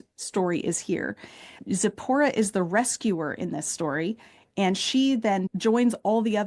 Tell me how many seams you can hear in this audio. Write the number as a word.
one